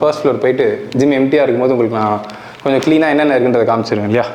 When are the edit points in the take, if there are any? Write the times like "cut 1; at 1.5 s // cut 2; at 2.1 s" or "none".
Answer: none